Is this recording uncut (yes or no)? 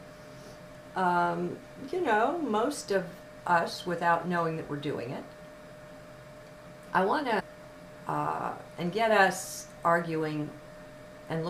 yes